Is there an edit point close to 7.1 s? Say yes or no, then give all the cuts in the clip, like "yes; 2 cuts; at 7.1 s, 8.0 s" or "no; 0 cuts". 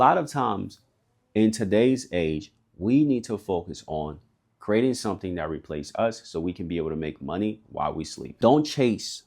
no; 1 cut; at 8.3 s